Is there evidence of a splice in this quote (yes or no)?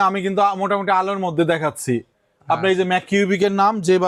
no